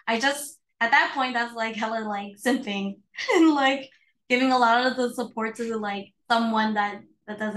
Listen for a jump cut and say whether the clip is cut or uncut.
uncut